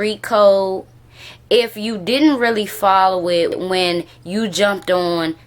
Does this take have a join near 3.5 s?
yes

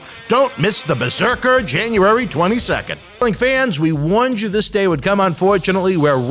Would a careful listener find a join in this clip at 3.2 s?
yes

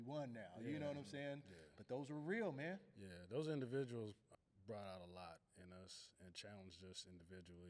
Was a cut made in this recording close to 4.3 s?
yes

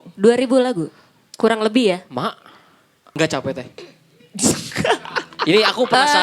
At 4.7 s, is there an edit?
no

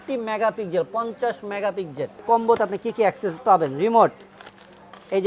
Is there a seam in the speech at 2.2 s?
yes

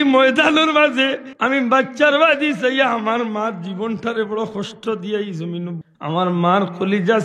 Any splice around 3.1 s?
no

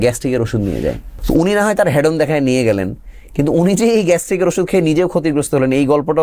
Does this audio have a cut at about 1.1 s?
yes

